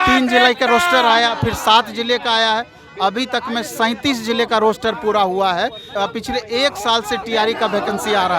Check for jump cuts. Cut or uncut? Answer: cut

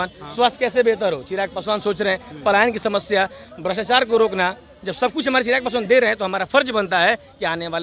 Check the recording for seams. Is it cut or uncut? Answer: uncut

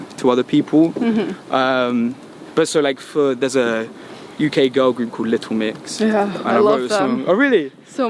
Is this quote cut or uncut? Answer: uncut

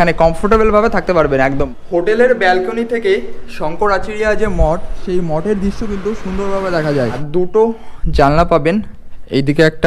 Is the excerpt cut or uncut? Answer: cut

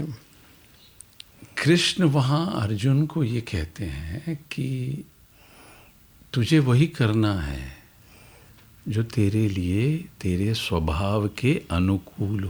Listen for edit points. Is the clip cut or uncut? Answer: uncut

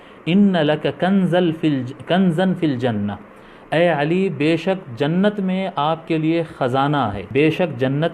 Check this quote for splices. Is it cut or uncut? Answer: cut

